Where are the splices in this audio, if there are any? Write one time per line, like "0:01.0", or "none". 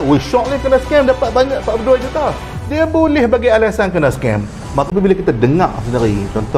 0:04.9

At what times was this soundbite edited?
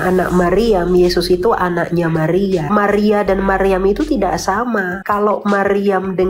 0:02.7
0:05.0

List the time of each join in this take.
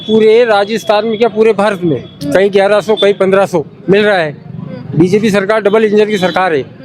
none

